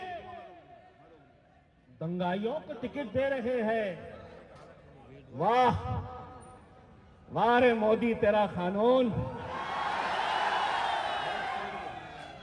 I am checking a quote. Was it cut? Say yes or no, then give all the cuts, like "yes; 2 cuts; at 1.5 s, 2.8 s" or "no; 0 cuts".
no; 0 cuts